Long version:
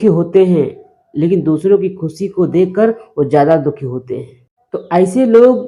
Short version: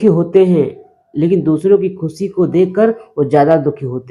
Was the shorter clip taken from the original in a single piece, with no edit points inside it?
yes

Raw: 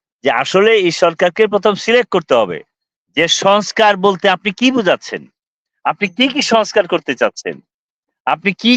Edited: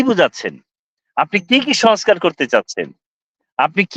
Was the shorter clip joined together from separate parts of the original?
no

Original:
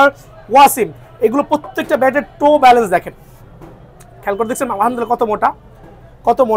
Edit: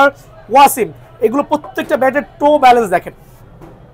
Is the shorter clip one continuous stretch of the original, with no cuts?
yes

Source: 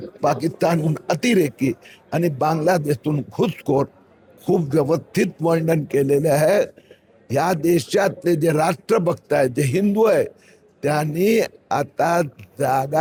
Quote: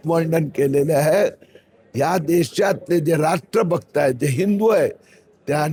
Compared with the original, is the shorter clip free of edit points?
yes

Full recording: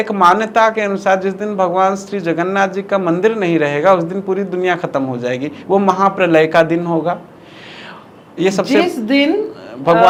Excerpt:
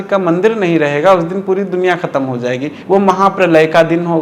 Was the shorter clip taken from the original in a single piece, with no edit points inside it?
yes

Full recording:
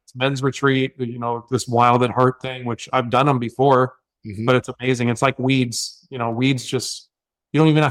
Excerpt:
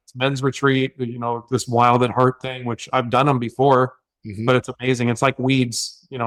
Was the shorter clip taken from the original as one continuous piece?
yes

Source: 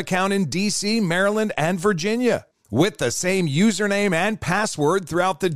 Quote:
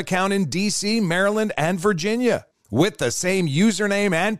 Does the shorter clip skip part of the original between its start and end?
no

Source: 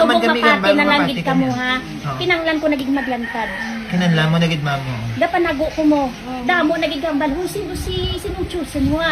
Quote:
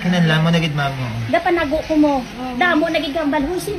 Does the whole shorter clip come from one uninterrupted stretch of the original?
yes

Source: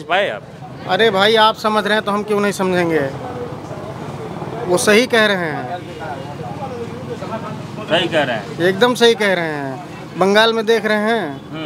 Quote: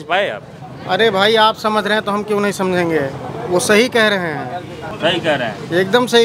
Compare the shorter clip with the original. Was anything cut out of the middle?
yes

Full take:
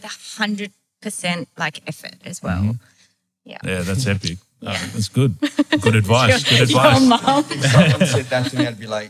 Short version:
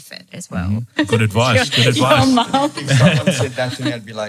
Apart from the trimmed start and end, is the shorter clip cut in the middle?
yes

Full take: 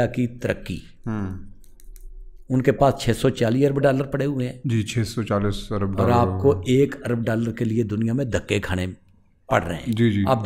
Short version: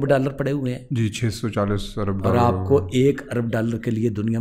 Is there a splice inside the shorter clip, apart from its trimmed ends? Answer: no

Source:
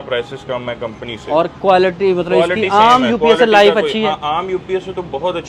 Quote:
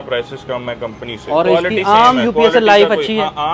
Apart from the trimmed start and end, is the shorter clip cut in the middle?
yes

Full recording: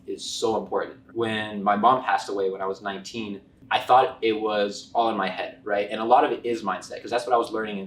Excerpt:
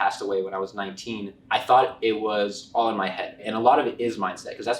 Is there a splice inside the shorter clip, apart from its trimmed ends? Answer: yes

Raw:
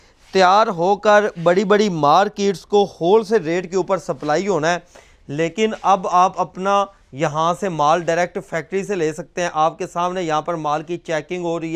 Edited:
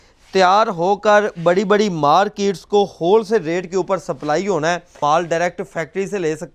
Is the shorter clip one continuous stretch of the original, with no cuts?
no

